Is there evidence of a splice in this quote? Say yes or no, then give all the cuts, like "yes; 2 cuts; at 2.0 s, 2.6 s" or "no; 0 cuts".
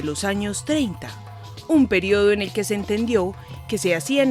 no; 0 cuts